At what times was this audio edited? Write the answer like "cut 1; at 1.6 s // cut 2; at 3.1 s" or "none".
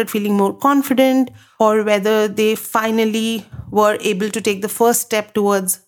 cut 1; at 1.4 s